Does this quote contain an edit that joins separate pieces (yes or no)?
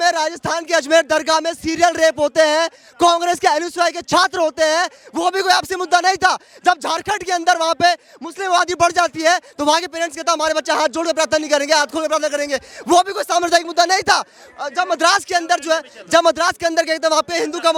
no